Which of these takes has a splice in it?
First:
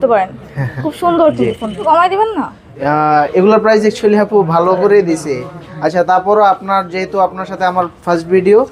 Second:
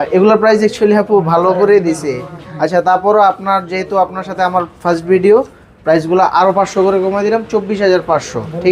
first; 1 cut; at 1.8 s

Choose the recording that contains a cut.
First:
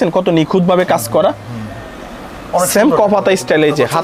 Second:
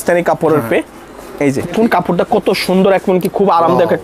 second; 1 cut; at 1.7 s

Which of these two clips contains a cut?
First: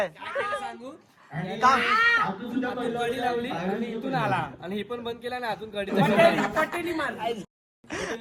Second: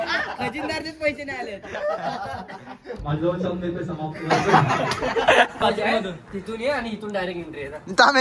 second; 1 cut; at 5.6 s

